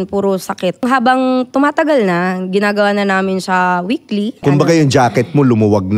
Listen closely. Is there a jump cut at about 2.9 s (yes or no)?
no